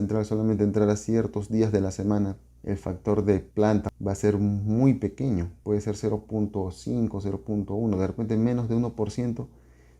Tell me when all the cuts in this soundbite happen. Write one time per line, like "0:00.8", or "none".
0:02.5
0:03.6
0:05.5

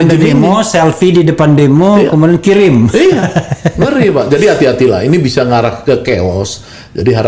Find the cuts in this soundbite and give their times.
none

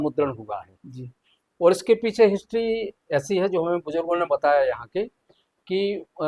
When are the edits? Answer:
none

